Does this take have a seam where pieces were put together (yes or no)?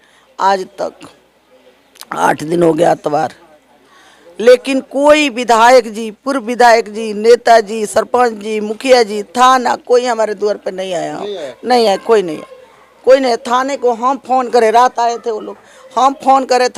no